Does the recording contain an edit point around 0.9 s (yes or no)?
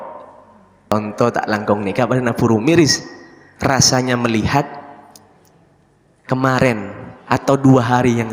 yes